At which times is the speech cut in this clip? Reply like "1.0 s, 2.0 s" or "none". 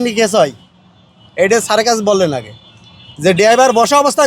none